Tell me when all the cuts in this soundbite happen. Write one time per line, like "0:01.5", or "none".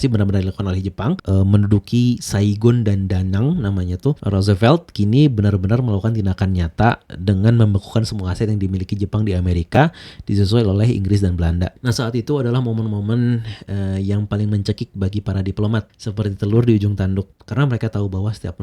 0:11.8